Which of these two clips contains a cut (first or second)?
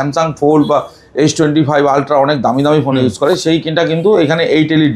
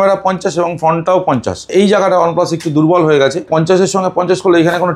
second